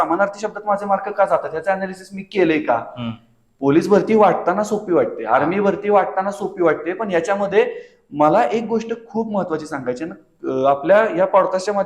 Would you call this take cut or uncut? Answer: uncut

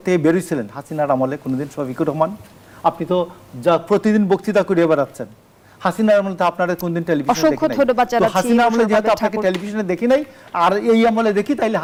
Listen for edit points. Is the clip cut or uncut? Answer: uncut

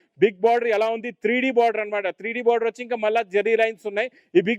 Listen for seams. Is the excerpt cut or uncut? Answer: uncut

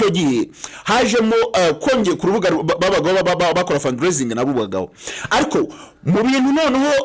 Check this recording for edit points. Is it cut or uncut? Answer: uncut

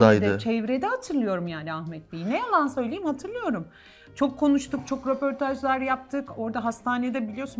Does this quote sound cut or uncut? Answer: uncut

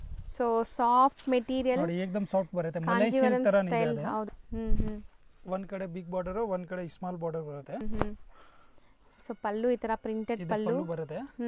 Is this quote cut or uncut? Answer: cut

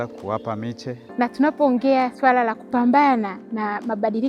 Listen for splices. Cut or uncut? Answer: cut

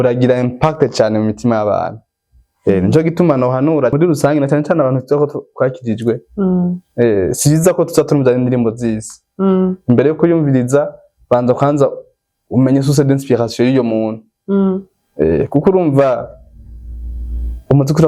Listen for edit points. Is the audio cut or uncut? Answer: cut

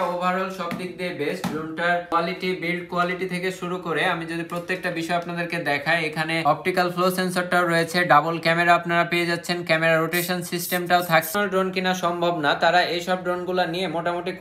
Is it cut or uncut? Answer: cut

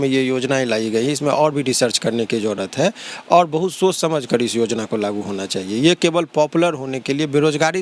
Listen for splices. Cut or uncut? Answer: uncut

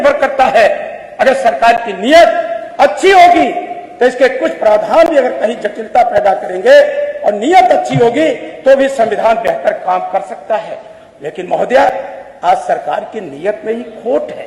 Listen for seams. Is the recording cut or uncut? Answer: uncut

